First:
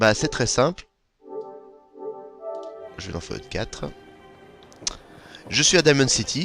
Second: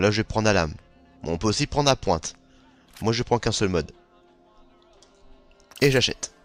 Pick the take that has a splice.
first; 1 cut; at 3.0 s

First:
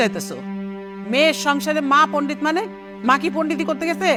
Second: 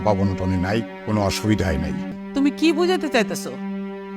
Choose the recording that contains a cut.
second; 2 cuts; at 1.0 s, 2.1 s

